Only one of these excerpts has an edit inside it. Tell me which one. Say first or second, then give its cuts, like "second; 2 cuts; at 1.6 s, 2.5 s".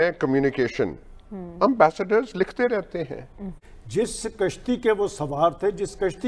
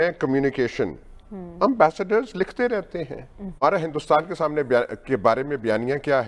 first; 1 cut; at 3.5 s